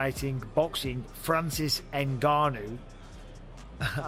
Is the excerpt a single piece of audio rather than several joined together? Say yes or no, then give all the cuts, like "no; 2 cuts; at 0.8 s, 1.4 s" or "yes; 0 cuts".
yes; 0 cuts